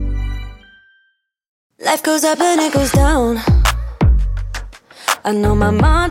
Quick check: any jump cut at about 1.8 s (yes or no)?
yes